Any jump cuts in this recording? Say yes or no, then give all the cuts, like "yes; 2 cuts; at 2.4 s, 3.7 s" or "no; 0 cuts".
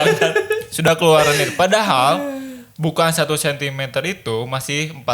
no; 0 cuts